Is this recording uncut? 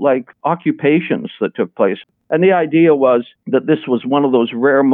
no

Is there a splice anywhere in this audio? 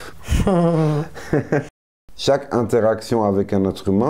yes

